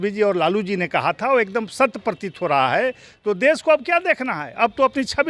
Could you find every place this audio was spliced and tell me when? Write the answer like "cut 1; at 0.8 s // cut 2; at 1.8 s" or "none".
none